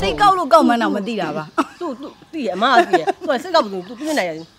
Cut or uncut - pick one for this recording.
uncut